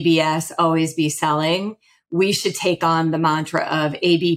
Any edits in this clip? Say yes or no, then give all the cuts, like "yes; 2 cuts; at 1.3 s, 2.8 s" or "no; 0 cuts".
no; 0 cuts